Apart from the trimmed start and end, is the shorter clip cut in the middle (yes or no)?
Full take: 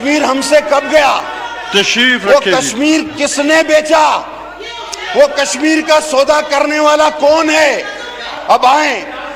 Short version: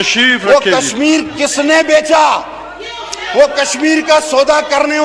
no